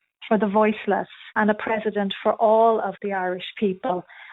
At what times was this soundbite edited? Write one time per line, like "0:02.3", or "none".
0:01.3